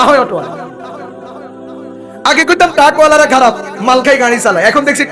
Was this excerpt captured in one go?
yes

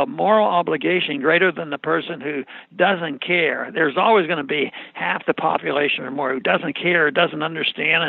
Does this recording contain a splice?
no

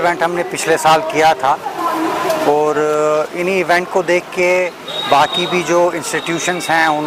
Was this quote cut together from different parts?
no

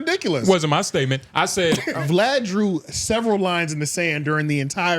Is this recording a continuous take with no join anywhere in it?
no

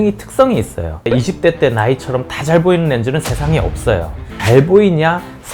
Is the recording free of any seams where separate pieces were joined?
no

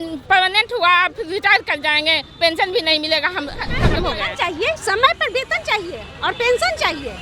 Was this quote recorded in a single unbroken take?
no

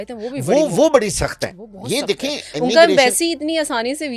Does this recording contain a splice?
no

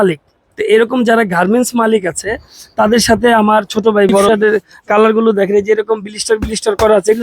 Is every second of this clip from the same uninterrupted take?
no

